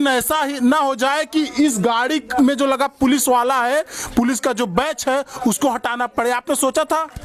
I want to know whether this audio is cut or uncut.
uncut